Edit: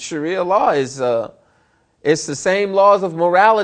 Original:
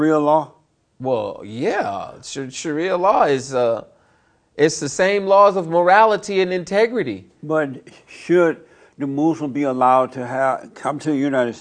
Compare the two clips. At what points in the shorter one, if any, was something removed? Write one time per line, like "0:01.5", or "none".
none